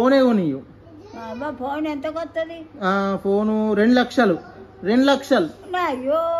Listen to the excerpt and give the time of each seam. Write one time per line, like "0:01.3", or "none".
none